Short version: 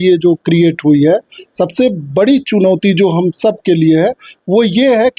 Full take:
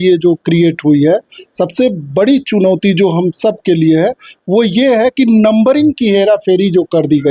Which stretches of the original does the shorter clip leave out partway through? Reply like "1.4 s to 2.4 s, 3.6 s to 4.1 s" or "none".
none